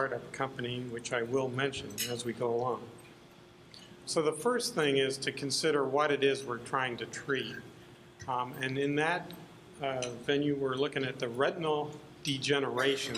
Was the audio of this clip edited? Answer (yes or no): yes